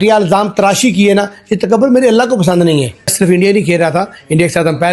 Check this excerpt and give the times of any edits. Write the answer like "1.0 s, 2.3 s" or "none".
3.1 s